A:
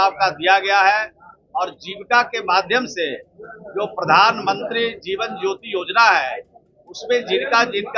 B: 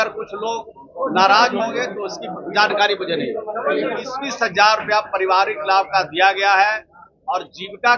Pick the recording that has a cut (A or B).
B